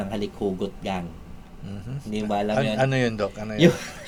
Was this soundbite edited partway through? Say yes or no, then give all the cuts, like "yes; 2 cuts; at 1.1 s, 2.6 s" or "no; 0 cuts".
no; 0 cuts